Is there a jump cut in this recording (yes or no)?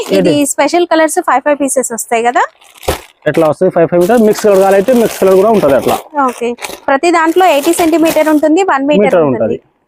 no